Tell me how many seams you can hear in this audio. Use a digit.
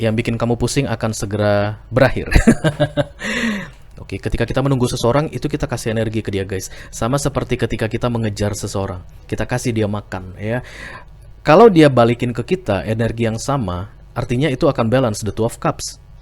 1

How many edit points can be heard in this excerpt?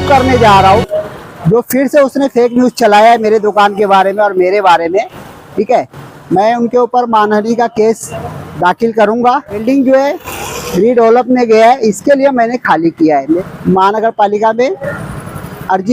2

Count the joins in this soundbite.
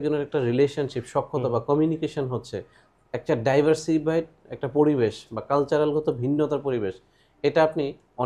0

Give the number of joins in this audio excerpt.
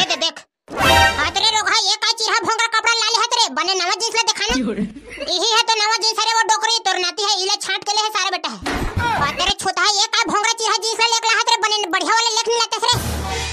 0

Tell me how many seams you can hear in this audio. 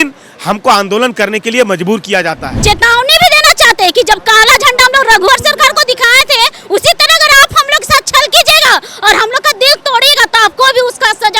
1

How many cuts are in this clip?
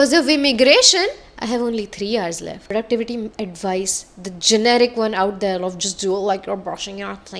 1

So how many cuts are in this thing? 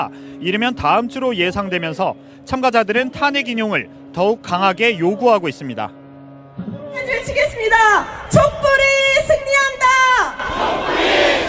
1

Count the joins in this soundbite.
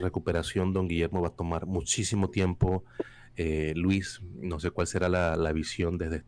0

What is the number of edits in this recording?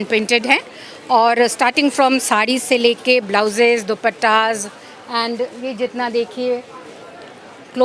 0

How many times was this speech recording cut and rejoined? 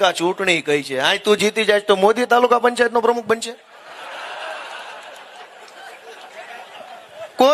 0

